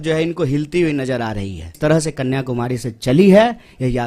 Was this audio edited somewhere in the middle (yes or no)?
yes